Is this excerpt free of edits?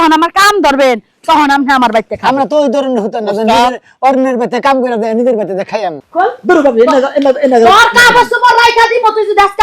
no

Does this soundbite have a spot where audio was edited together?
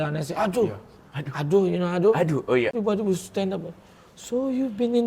yes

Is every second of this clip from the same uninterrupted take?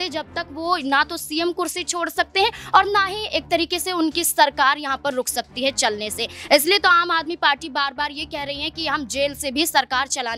yes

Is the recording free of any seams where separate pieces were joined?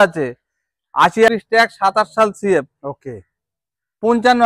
no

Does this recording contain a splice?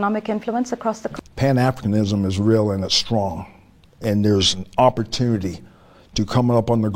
yes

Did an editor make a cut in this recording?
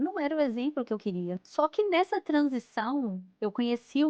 yes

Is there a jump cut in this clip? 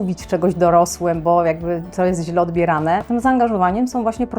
yes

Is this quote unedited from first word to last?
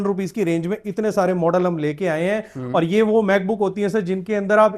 yes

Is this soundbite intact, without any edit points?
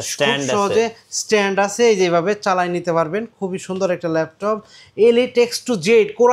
yes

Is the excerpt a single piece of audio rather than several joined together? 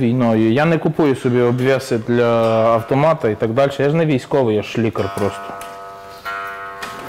yes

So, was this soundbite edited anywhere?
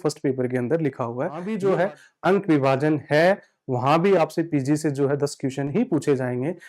yes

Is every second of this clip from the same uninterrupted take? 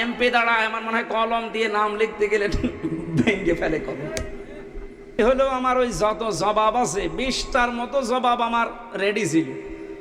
no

